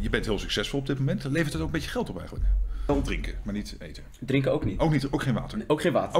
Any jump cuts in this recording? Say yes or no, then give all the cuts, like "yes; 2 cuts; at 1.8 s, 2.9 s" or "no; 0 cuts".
yes; 1 cut; at 2.9 s